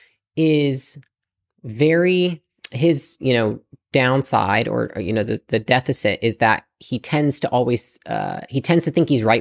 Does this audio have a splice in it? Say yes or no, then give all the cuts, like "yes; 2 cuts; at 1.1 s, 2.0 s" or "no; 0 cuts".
no; 0 cuts